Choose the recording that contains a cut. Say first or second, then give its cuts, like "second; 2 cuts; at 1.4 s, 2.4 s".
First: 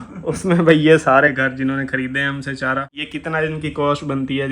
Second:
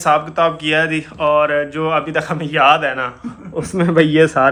first; 1 cut; at 3.0 s